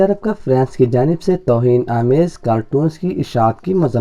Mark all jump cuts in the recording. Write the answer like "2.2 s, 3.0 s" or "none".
none